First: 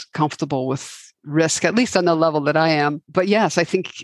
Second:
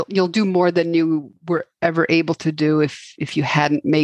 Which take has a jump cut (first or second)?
first